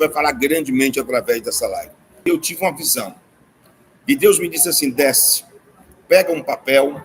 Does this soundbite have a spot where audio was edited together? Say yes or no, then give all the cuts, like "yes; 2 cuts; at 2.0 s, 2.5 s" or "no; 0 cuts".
yes; 1 cut; at 2.2 s